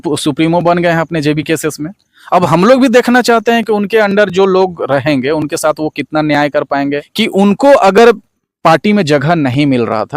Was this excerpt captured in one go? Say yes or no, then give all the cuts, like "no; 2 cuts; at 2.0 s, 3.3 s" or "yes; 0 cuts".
no; 1 cut; at 7.1 s